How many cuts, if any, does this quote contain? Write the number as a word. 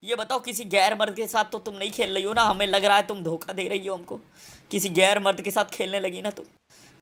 zero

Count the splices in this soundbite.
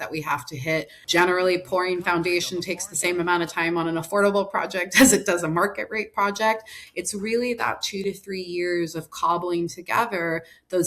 one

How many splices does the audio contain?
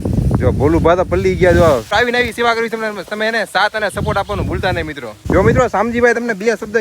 two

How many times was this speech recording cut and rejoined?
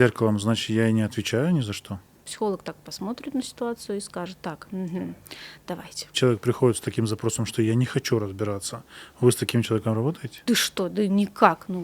three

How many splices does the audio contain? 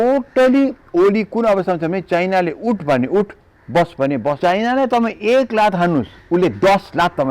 one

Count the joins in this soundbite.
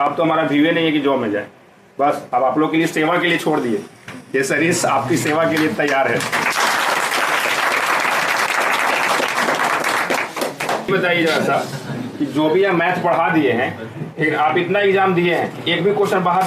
one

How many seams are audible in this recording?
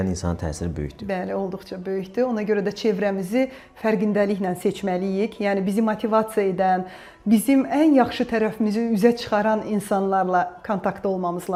zero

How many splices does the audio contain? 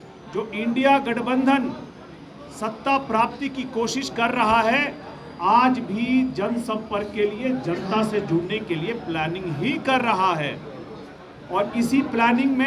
zero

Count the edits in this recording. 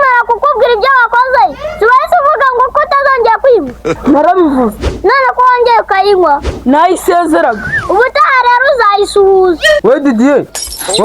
one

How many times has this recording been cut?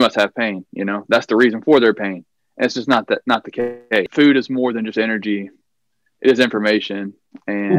one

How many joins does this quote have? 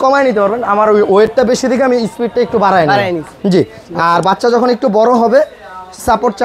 zero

